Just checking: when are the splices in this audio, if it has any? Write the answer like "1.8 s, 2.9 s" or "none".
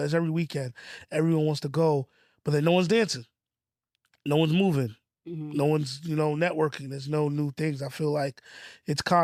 none